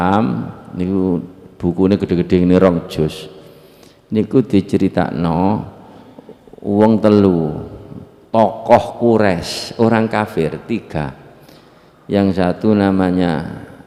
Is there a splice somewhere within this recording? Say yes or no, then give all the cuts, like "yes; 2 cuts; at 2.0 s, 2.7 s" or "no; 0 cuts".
no; 0 cuts